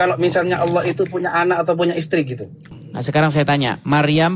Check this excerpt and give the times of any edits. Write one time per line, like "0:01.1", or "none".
0:02.8